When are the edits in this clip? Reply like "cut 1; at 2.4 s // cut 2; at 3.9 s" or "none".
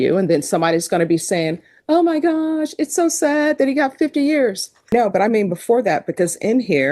cut 1; at 4.9 s